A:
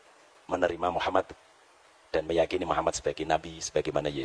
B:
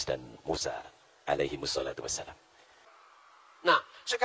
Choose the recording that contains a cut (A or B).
B